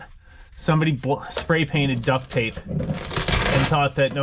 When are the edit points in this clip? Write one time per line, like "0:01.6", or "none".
none